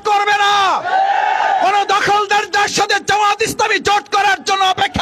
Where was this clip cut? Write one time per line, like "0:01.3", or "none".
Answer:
none

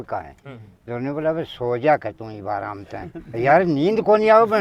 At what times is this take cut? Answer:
none

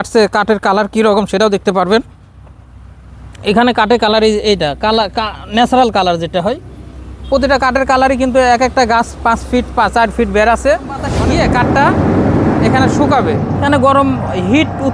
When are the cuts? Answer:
0:11.1
0:13.6

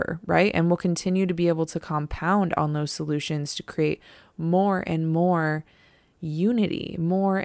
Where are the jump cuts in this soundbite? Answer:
none

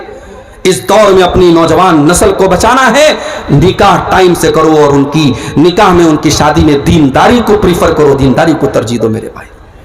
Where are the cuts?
none

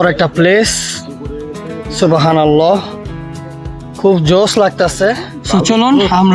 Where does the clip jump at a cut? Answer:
0:05.4

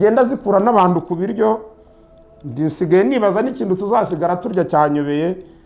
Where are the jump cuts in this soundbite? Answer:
none

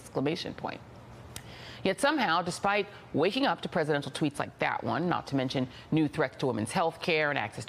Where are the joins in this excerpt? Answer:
0:03.0

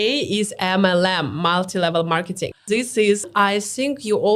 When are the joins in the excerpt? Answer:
0:03.3

